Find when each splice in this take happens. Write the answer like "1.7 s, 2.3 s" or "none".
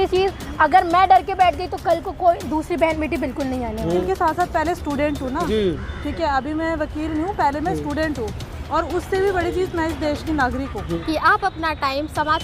4.0 s, 10.9 s